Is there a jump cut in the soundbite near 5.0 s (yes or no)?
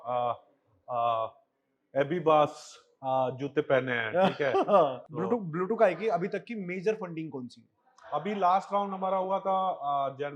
yes